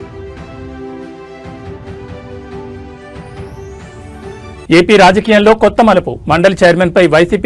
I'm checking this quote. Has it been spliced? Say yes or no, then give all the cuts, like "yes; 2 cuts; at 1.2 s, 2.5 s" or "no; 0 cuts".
no; 0 cuts